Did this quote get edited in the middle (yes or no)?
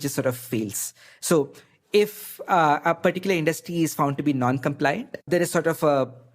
yes